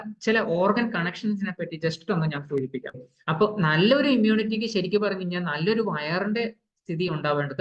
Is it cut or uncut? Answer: cut